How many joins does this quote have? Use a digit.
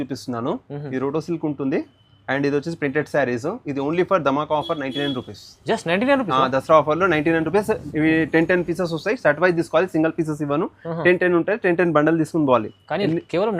0